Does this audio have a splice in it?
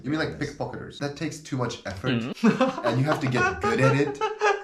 yes; 1 cut; at 0.9 s

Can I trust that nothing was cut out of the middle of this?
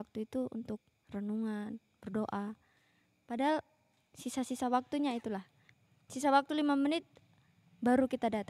yes; 0 cuts

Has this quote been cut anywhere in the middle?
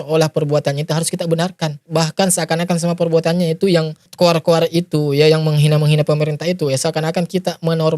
yes; 2 cuts; at 1.8 s, 4.0 s

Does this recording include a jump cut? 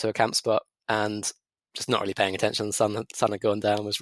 no; 0 cuts

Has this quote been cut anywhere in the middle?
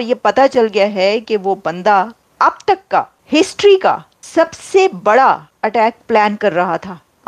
yes; 4 cuts; at 2.2 s, 3.2 s, 4.1 s, 5.5 s

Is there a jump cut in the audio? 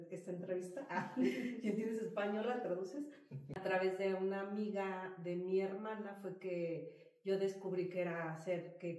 yes; 1 cut; at 3.6 s

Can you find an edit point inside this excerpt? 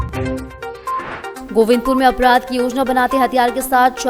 yes; 1 cut; at 1.2 s

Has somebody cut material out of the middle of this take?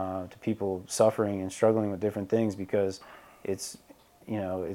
no; 0 cuts

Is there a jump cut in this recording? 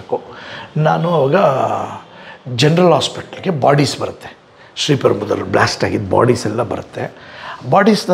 no; 0 cuts

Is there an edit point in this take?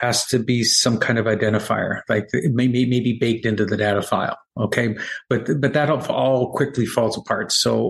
no; 0 cuts

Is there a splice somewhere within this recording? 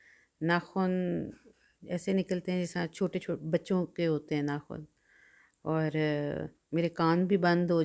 no; 0 cuts

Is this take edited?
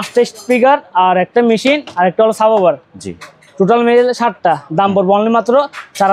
no; 0 cuts

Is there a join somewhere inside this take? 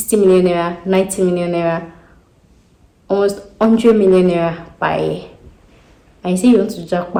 no; 0 cuts

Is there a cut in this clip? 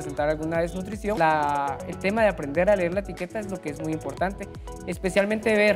yes; 1 cut; at 1.2 s

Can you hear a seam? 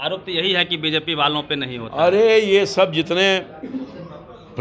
no; 0 cuts

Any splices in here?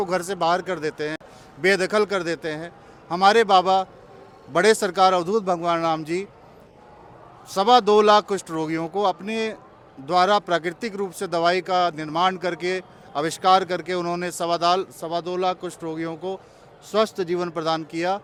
no; 0 cuts

